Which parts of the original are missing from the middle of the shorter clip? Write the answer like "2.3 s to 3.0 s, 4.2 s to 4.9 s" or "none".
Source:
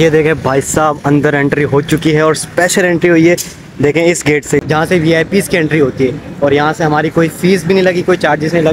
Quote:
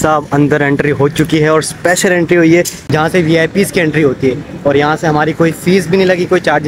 3.6 s to 4.7 s